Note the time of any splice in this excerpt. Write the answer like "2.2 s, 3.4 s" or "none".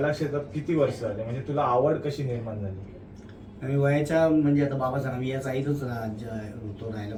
none

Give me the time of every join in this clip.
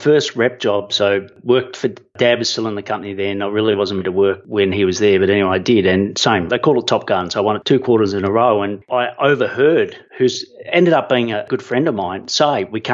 1.3 s, 6.5 s, 7.6 s, 8.8 s, 10.0 s, 11.4 s

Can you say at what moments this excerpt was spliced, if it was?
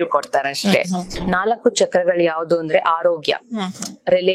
1.1 s

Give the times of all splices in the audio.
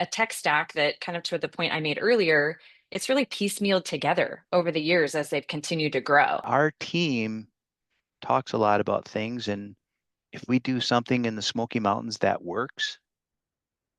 6.4 s

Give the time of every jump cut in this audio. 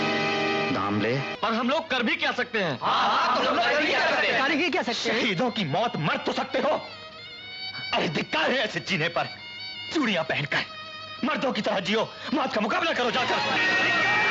1.3 s, 13.4 s

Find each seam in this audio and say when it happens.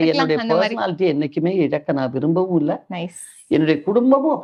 none

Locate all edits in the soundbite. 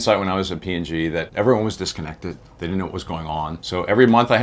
1.3 s, 2.5 s, 3.6 s

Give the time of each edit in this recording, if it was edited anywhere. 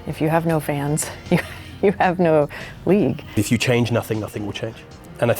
3.4 s

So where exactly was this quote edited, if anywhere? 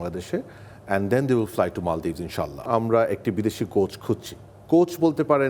2.6 s

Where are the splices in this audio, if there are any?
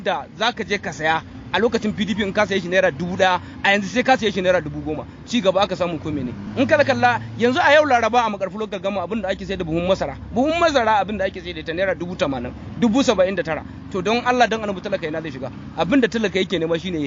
none

